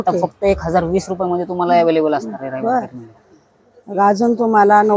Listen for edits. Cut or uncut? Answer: uncut